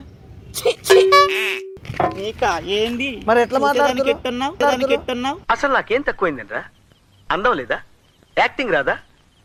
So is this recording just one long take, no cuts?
yes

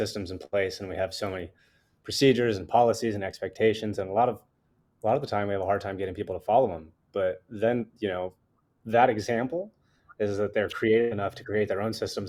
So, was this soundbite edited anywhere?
no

